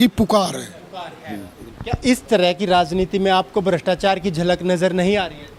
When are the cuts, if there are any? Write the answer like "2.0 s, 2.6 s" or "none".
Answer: none